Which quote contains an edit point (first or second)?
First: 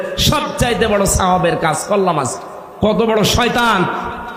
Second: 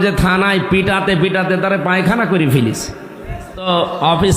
second